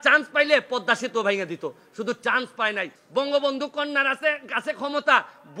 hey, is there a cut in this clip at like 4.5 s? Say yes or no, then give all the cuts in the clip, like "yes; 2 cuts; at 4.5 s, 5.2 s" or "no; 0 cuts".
no; 1 cut; at 2.9 s